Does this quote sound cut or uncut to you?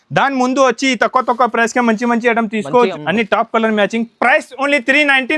cut